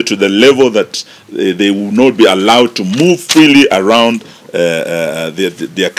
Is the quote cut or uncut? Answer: uncut